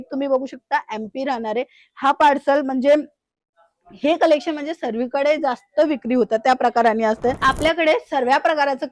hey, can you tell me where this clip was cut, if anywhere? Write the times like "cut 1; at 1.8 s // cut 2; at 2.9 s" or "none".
cut 1; at 7.4 s